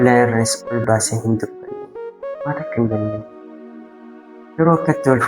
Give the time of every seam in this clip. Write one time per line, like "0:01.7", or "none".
0:03.1
0:04.6